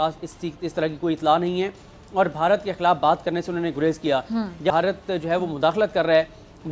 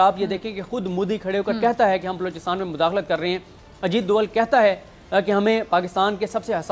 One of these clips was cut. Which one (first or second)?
first